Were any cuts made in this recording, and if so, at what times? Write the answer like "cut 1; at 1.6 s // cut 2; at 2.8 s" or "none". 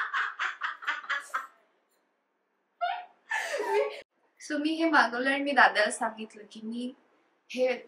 cut 1; at 4.1 s